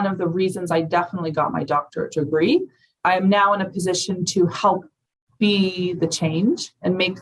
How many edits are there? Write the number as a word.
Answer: one